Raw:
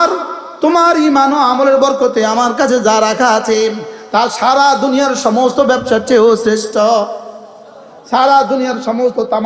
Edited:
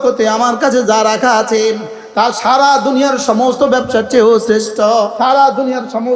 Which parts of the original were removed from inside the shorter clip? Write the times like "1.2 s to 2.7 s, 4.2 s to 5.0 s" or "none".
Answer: 7.1 s to 8.1 s